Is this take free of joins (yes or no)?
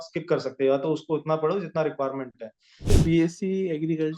no